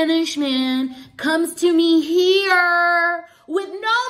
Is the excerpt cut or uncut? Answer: uncut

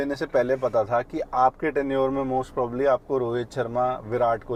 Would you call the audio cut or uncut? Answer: uncut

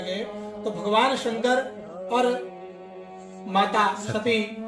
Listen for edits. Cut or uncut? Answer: uncut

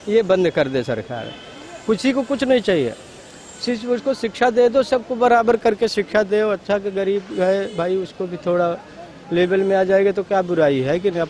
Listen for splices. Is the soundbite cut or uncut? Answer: uncut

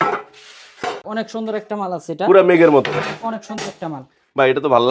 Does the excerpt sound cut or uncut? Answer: cut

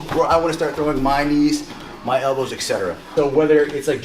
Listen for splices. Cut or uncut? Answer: cut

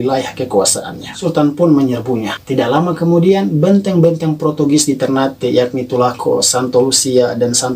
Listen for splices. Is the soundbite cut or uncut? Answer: cut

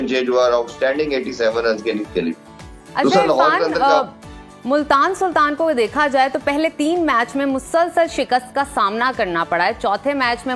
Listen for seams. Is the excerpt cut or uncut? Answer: uncut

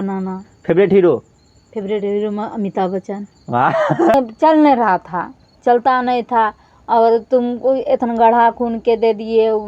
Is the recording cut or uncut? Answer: cut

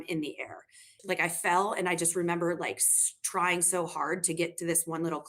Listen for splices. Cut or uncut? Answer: cut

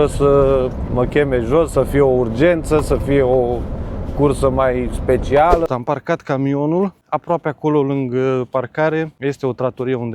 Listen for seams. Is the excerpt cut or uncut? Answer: cut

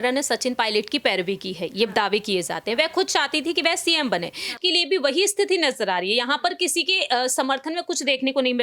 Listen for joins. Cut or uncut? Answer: cut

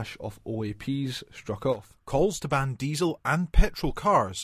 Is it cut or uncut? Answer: cut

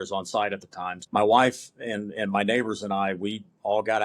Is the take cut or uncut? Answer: cut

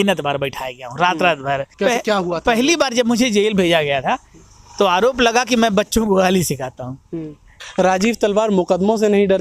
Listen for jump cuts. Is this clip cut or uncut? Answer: cut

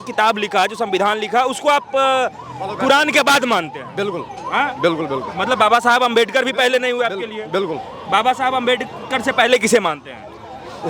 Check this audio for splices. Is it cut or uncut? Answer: uncut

